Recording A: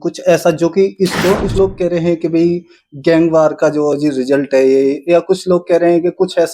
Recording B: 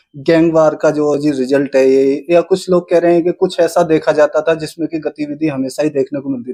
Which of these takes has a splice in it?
A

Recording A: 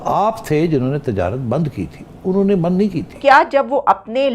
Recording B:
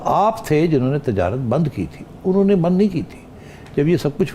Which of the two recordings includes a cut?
A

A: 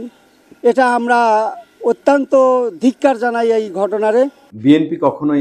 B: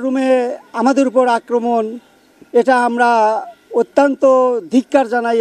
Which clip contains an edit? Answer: A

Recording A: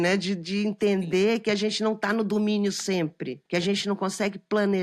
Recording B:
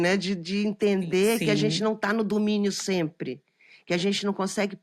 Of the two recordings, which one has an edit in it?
A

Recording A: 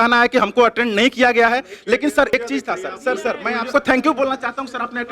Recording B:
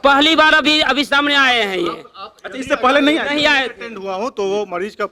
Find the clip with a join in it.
A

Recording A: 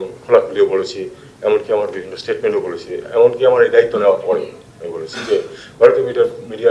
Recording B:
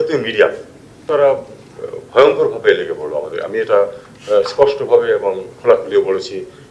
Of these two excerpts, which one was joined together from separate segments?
B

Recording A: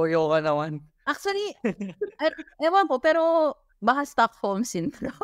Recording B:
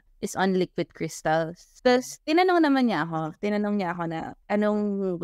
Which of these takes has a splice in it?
B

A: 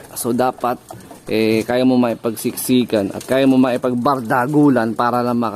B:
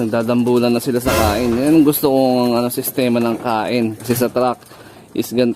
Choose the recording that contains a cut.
B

